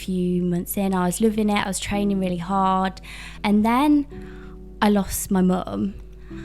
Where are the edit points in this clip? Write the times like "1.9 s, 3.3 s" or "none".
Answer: 3.4 s